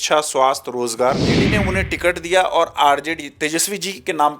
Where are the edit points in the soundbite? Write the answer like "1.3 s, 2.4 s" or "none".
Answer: 1.4 s